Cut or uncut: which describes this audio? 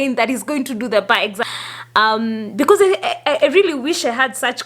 cut